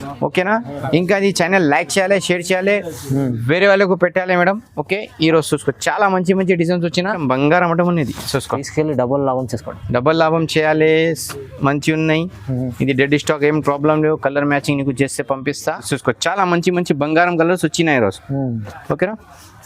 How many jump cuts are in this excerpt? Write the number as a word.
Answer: two